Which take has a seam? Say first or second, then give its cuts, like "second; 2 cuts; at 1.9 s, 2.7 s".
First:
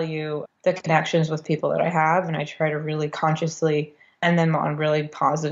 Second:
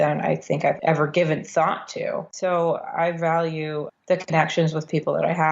second; 2 cuts; at 0.8 s, 2.3 s